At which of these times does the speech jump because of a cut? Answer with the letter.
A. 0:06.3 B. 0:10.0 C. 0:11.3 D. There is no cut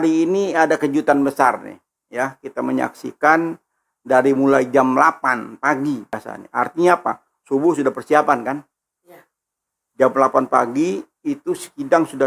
A